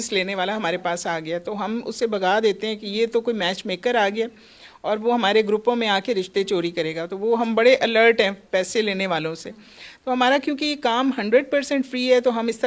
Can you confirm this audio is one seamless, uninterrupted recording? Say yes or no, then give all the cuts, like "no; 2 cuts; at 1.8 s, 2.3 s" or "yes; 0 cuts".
yes; 0 cuts